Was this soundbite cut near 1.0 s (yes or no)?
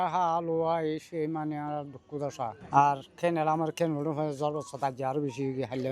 no